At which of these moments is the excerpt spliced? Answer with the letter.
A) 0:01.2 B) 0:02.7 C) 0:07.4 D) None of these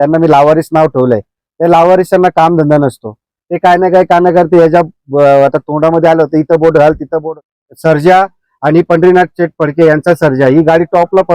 C